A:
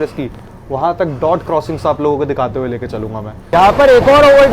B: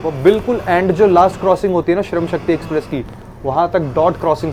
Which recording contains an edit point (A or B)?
A